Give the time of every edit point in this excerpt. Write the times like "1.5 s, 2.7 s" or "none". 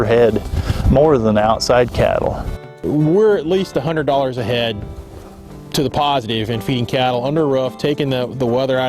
2.7 s